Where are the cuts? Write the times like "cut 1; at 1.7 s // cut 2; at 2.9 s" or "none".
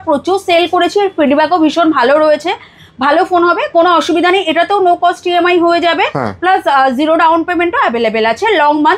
none